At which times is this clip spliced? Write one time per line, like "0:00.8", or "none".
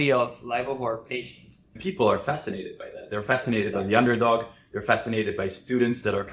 0:01.8